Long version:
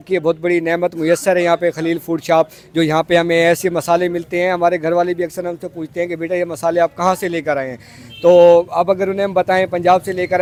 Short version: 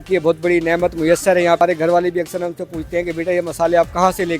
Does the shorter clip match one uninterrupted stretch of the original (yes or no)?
no